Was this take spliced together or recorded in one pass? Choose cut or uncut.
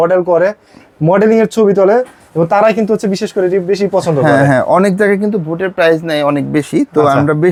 uncut